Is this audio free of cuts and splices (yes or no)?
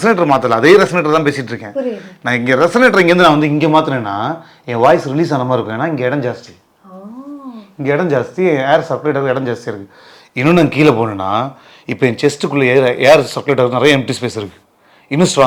yes